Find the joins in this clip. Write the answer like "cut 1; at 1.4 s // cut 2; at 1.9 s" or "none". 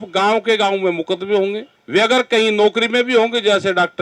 cut 1; at 1.7 s